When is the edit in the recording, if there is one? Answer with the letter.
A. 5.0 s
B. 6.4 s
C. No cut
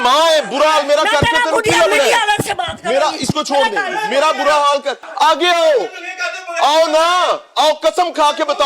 A